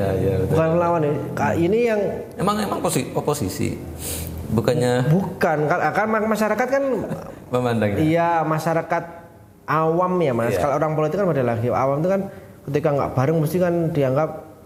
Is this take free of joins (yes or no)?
yes